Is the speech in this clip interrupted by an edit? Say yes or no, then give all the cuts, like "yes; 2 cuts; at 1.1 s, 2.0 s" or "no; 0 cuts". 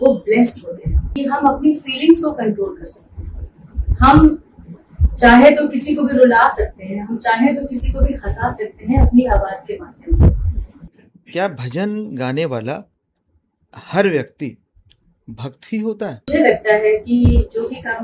yes; 3 cuts; at 1.1 s, 10.7 s, 16.3 s